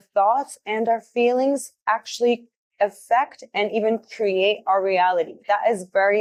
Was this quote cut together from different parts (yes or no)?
no